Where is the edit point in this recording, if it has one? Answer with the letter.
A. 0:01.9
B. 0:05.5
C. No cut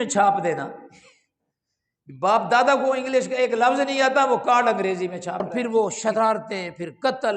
B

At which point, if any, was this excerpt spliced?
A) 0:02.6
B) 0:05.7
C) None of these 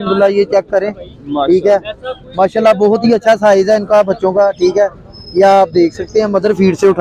C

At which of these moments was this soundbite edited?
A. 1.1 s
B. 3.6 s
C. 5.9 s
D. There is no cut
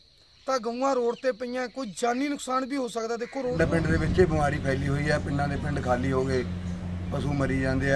B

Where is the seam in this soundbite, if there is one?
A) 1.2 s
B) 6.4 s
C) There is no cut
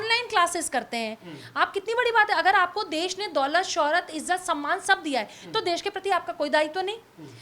C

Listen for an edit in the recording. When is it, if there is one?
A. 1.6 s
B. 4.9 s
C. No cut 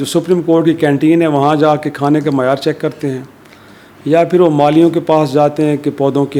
C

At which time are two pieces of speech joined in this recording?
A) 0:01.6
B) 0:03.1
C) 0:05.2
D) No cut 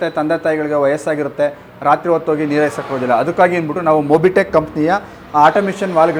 D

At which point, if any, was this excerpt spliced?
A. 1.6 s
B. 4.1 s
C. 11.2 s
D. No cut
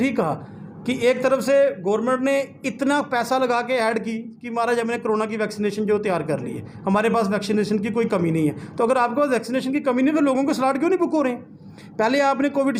D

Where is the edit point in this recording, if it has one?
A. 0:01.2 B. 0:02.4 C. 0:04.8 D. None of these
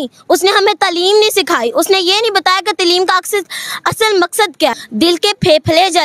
C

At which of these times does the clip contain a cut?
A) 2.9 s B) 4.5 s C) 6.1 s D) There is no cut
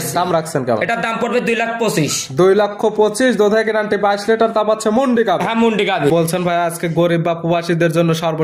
C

